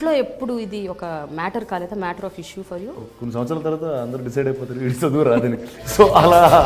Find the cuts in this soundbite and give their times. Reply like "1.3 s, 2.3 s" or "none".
3.1 s